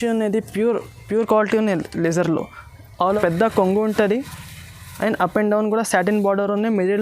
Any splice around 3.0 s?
yes; 1 cut; at 3.0 s

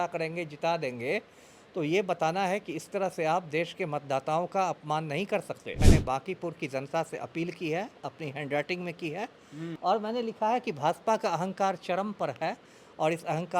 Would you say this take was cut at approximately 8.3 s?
no; 2 cuts; at 5.8 s, 9.7 s

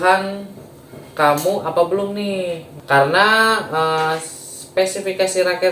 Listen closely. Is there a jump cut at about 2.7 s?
yes; 1 cut; at 2.7 s

